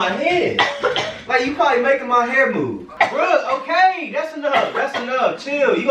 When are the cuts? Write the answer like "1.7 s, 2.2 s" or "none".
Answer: 2.8 s